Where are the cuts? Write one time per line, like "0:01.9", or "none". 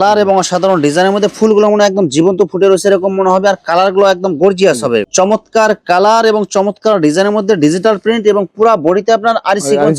0:05.1